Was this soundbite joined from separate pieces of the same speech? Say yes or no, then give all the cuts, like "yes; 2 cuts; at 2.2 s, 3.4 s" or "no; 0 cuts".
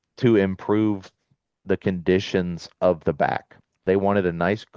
yes; 1 cut; at 3.8 s